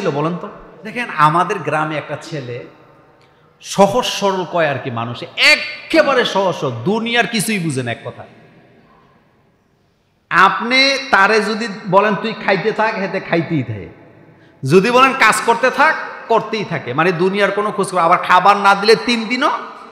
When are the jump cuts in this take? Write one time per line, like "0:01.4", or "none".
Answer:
0:01.0